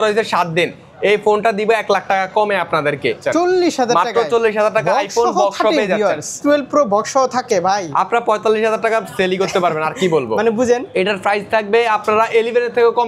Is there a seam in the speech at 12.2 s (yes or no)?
no